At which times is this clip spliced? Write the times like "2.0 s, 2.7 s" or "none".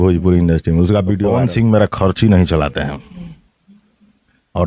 1.3 s